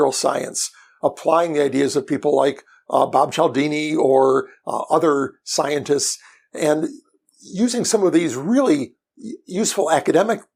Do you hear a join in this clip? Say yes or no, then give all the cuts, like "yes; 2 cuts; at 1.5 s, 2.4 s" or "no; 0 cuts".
no; 0 cuts